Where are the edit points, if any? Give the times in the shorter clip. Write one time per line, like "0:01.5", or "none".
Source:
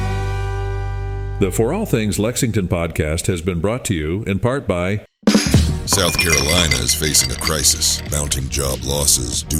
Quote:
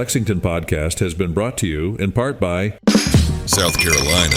0:02.7